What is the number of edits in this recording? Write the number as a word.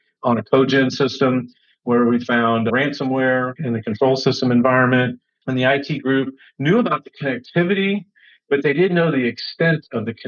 one